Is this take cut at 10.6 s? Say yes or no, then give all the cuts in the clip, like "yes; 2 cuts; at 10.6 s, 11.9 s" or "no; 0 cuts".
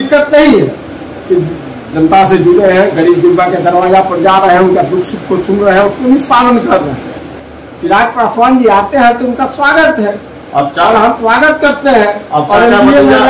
no; 1 cut; at 7.4 s